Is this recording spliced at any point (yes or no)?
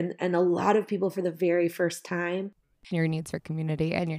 yes